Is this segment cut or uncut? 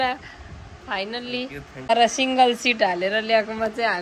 cut